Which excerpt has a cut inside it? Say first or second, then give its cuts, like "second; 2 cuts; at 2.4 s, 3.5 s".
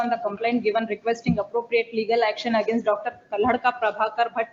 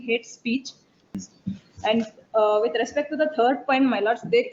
second; 1 cut; at 1.0 s